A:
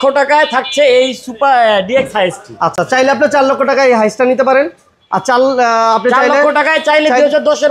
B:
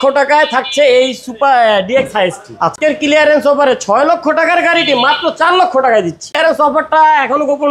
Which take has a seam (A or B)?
B